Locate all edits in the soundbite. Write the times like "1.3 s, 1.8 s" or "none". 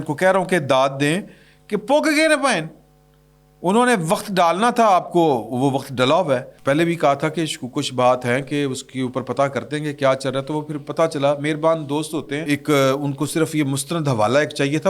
6.5 s, 12.4 s